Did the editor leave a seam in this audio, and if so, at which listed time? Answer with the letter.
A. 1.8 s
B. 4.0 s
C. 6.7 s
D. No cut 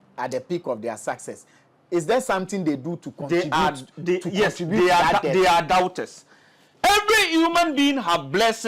C